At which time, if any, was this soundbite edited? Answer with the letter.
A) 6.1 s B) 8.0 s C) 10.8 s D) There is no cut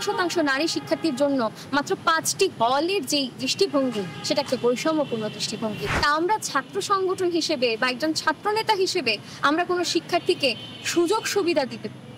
A